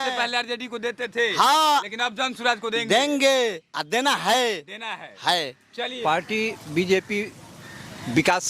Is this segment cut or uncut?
cut